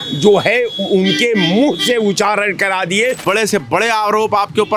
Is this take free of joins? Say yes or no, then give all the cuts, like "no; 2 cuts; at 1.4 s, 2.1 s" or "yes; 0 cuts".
no; 1 cut; at 3.2 s